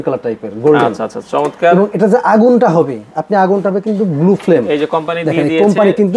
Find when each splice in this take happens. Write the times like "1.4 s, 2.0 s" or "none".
none